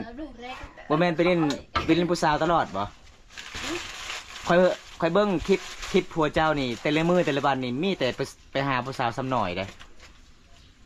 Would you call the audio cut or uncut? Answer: uncut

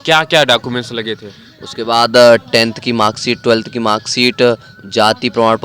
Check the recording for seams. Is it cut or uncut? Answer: uncut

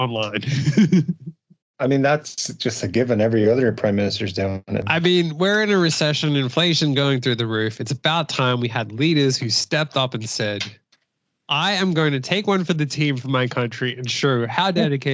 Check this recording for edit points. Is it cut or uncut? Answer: cut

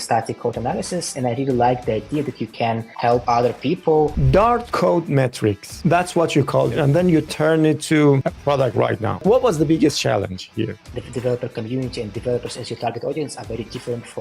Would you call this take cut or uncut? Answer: cut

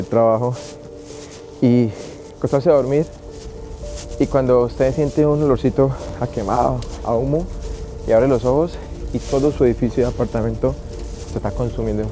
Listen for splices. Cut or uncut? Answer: uncut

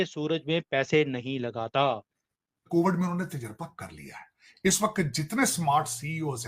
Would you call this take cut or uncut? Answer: cut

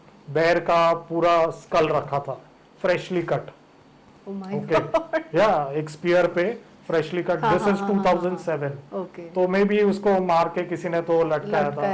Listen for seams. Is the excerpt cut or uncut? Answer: uncut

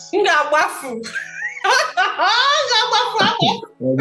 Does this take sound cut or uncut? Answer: uncut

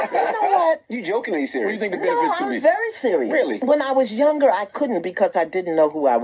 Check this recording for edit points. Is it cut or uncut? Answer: cut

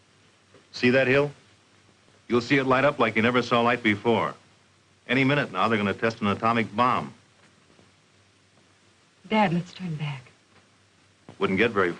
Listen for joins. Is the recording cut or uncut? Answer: uncut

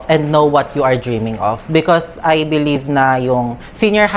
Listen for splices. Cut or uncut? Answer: uncut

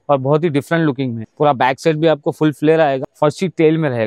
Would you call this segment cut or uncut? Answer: cut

